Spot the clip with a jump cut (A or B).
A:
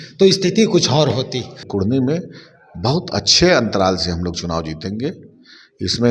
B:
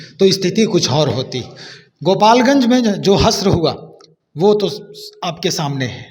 A